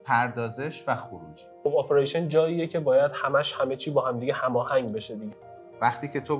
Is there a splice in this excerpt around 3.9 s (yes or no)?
no